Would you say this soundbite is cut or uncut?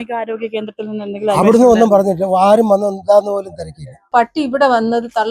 cut